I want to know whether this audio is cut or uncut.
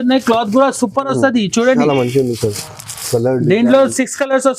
uncut